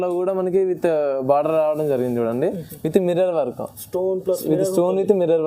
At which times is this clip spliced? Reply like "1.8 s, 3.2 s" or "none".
none